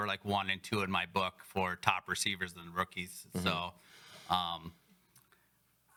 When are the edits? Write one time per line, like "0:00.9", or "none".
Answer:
none